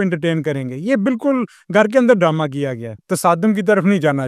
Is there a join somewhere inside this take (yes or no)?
yes